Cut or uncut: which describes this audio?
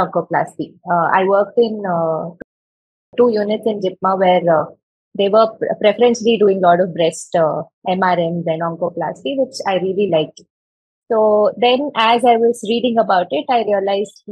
uncut